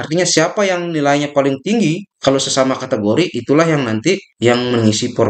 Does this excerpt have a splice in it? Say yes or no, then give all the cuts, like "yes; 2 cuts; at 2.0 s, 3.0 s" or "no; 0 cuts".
yes; 1 cut; at 4.3 s